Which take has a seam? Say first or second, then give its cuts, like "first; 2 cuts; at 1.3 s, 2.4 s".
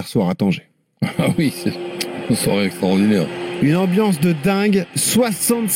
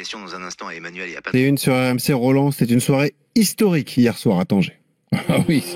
second; 1 cut; at 1.3 s